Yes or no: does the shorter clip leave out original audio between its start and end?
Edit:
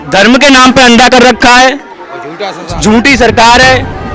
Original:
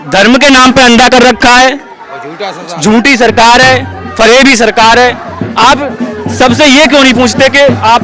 no